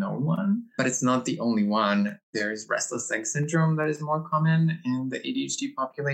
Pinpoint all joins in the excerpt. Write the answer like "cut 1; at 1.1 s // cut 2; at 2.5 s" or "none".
cut 1; at 0.8 s // cut 2; at 2.3 s